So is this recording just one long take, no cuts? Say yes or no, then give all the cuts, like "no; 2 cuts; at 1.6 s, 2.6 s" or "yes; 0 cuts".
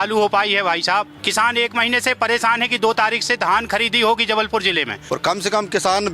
no; 2 cuts; at 1.2 s, 5.0 s